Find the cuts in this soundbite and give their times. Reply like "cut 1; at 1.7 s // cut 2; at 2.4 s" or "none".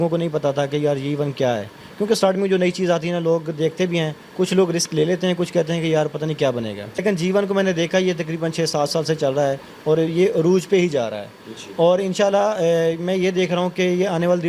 cut 1; at 7.0 s